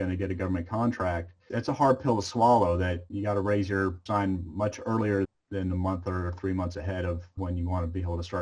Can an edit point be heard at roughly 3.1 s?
yes; 5 cuts; at 1.4 s, 3.1 s, 4.0 s, 5.3 s, 7.3 s

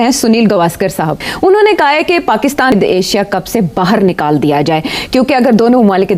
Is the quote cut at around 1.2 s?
yes; 2 cuts; at 1.2 s, 2.7 s

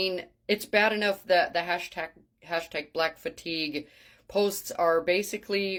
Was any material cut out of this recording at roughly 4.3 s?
no; 0 cuts

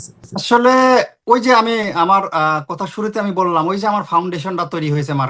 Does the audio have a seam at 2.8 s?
no; 0 cuts

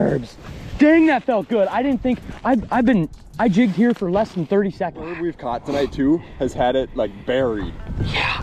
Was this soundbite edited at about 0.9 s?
no; 1 cut; at 5.2 s

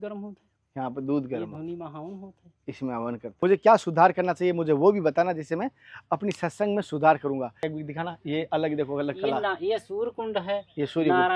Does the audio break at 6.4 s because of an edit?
no; 2 cuts; at 3.3 s, 7.7 s

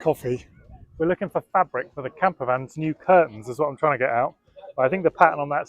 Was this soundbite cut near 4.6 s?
no; 0 cuts

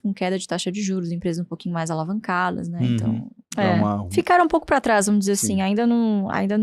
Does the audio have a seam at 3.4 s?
yes; 1 cut; at 3.4 s

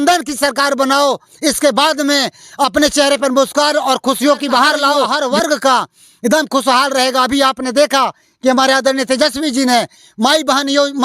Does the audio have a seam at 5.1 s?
yes; 1 cut; at 5.1 s

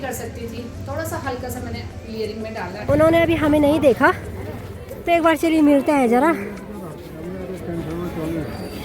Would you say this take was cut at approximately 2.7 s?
yes; 1 cut; at 2.7 s

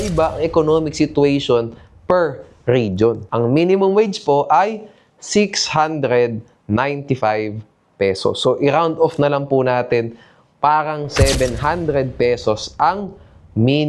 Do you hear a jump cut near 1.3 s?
no; 1 cut; at 3.2 s

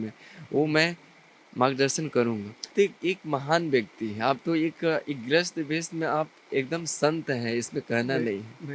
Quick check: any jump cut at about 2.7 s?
yes; 1 cut; at 2.7 s

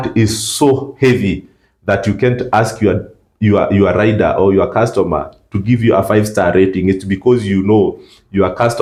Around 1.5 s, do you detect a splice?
no; 0 cuts

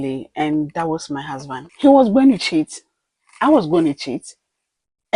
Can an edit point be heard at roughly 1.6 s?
yes; 1 cut; at 1.6 s

